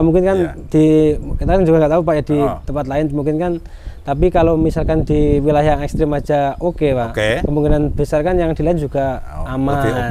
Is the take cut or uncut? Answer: uncut